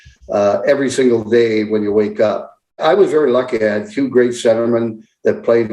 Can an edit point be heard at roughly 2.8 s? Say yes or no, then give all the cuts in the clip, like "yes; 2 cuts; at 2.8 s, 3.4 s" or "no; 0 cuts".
yes; 1 cut; at 2.8 s